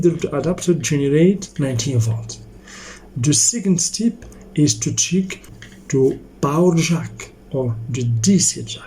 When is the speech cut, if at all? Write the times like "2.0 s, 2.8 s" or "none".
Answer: 1.5 s, 5.6 s